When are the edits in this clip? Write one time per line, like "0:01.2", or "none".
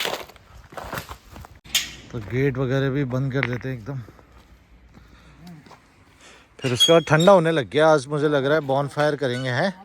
0:01.6